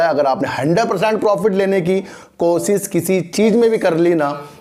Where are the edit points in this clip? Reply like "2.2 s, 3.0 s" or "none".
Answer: none

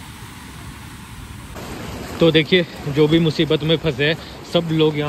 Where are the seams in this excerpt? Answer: 1.6 s

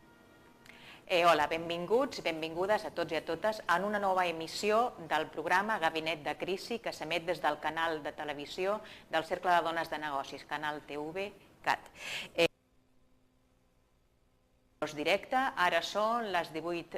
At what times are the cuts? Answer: 8.0 s

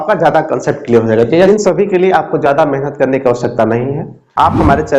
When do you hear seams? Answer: 1.5 s

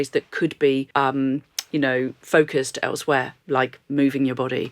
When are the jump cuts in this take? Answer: 0.9 s, 2.2 s

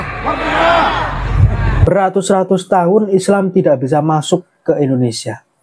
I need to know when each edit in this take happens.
1.8 s

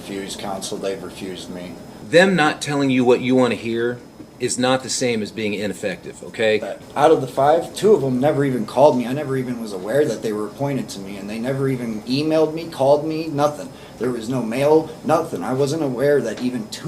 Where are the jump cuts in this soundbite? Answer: 1.9 s, 6.8 s

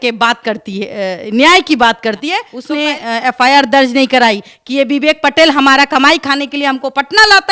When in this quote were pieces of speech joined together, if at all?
2.5 s

